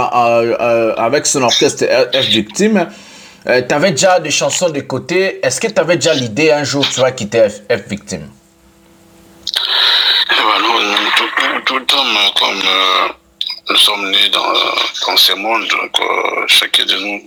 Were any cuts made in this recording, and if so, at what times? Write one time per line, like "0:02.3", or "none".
none